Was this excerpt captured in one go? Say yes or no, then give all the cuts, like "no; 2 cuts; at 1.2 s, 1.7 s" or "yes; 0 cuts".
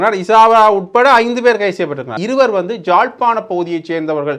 no; 1 cut; at 2.1 s